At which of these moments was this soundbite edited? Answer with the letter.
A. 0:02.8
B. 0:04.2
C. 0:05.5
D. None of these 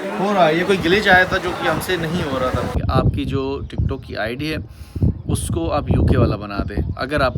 A